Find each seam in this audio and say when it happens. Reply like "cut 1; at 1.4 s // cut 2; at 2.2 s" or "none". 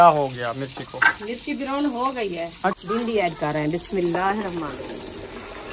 cut 1; at 2.8 s